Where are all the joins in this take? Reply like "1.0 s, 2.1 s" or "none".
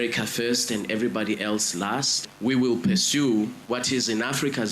2.2 s, 3.6 s